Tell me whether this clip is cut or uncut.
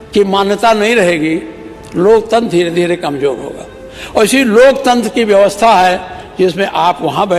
uncut